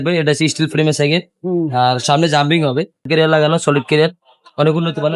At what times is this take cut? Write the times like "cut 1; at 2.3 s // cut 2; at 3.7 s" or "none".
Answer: cut 1; at 3.1 s